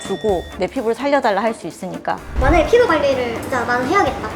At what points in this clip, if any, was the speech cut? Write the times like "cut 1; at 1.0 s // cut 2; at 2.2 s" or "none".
cut 1; at 2.4 s